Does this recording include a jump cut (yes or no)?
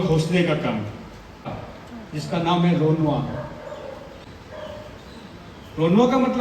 yes